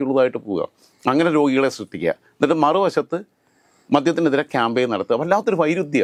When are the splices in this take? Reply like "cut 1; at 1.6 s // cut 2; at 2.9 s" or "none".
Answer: none

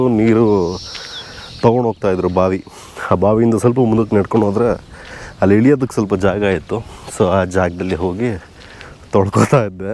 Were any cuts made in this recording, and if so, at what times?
none

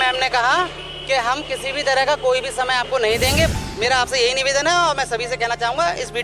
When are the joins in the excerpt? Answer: cut 1; at 3.5 s

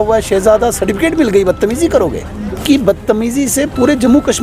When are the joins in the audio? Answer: cut 1; at 2.6 s

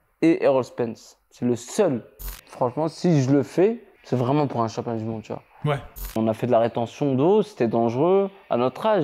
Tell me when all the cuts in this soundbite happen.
cut 1; at 2.4 s // cut 2; at 3.9 s // cut 3; at 6.1 s

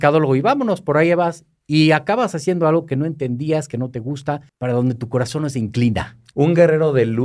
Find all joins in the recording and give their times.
cut 1; at 4.5 s // cut 2; at 6.2 s

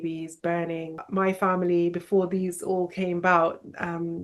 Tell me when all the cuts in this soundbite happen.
cut 1; at 1.0 s

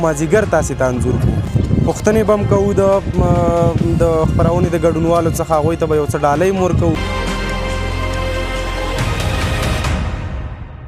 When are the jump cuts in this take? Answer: cut 1; at 1.5 s // cut 2; at 7.0 s

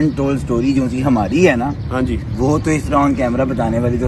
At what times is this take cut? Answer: none

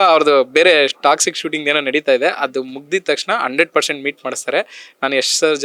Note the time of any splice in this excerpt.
none

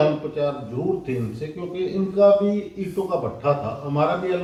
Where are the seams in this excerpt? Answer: none

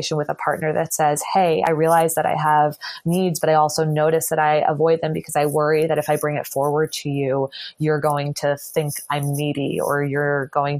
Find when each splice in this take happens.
none

